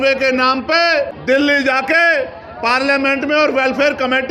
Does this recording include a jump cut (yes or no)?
yes